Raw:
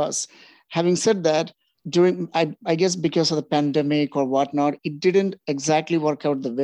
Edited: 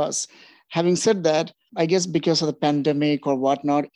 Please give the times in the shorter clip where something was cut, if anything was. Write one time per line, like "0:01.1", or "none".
0:01.7